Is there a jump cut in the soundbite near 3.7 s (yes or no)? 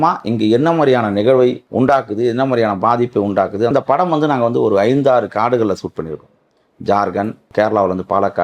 yes